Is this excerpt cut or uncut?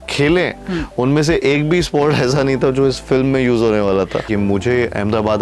cut